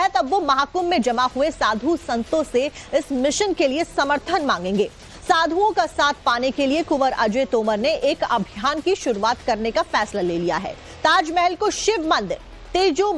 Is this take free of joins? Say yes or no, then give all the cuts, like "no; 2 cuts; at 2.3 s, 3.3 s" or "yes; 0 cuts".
no; 1 cut; at 3.9 s